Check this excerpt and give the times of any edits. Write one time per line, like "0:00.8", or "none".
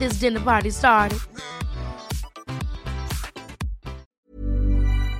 0:04.2